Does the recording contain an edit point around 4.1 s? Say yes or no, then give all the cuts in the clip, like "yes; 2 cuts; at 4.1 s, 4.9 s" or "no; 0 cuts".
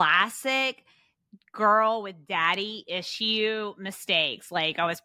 no; 0 cuts